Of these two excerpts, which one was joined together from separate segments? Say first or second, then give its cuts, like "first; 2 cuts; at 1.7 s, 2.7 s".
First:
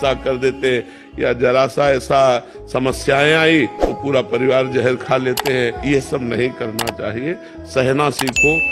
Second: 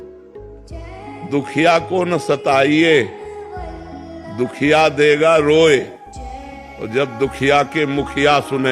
second; 1 cut; at 1.2 s